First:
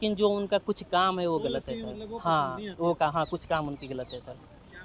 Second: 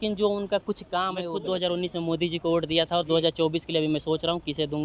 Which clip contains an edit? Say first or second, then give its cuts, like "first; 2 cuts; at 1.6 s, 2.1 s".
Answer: second; 1 cut; at 1.3 s